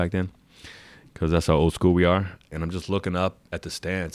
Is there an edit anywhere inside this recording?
yes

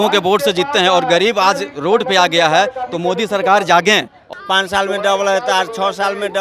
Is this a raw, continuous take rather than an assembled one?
no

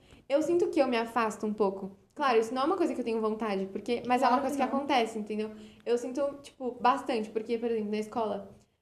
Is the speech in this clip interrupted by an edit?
no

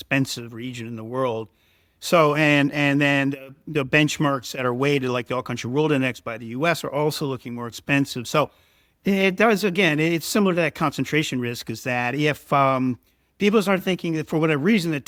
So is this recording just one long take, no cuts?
yes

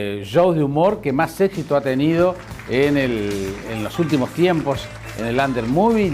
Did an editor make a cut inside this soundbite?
yes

